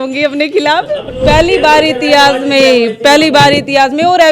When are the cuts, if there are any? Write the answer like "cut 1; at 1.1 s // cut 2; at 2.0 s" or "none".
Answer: cut 1; at 1.1 s